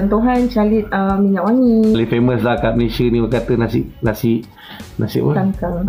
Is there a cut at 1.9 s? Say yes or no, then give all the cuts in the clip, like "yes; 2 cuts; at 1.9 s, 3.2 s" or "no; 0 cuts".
yes; 1 cut; at 1.9 s